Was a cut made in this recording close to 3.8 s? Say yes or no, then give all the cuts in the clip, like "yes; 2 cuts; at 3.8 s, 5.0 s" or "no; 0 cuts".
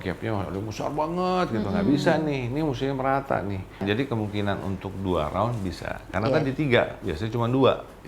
yes; 1 cut; at 3.8 s